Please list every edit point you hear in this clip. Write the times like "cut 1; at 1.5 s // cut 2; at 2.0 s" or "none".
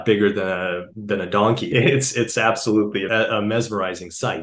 cut 1; at 1.6 s // cut 2; at 3.1 s

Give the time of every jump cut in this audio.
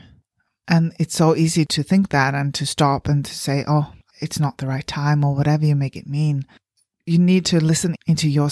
cut 1; at 6.8 s

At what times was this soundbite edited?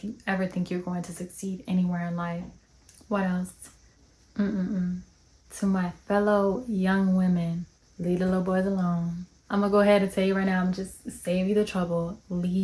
none

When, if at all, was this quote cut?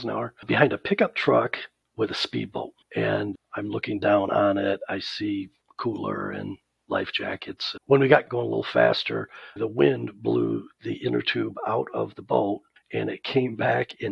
cut 1; at 3.4 s // cut 2; at 7.7 s // cut 3; at 8.3 s // cut 4; at 9.6 s

